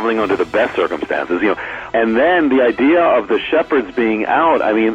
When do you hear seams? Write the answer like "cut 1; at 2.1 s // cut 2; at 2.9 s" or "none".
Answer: cut 1; at 1.8 s